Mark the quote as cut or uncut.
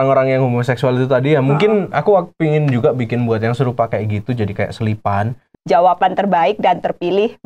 cut